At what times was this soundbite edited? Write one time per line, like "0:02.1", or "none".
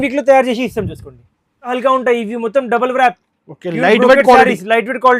0:01.7